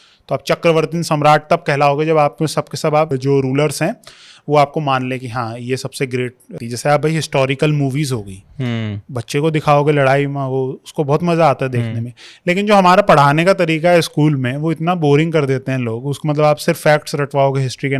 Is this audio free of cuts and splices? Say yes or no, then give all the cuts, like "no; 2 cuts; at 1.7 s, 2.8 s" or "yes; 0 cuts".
no; 2 cuts; at 3.2 s, 6.5 s